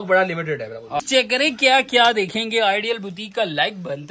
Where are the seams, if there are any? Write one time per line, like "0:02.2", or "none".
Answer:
0:01.0